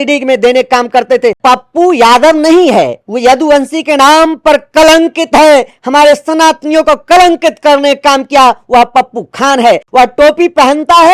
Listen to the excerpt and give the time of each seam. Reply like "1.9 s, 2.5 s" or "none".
1.4 s, 9.8 s